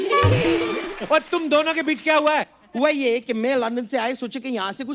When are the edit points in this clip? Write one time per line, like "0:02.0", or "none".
none